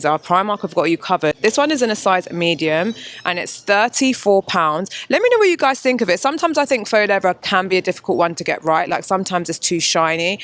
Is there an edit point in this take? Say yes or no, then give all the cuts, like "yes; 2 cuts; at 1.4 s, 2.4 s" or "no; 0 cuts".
no; 0 cuts